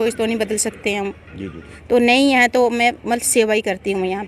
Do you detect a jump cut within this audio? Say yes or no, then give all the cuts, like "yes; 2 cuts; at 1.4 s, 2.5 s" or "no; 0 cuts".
yes; 1 cut; at 1.7 s